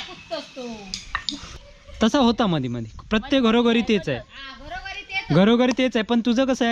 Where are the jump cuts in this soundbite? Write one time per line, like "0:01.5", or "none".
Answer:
0:01.5

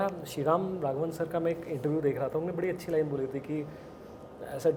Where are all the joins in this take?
none

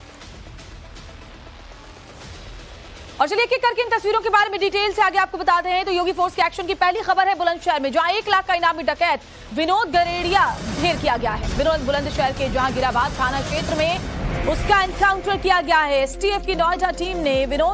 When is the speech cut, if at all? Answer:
0:03.5

